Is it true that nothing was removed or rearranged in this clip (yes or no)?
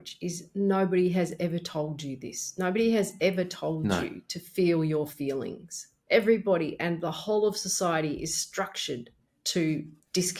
yes